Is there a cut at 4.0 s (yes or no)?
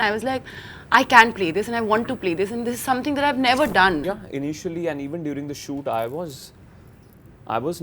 yes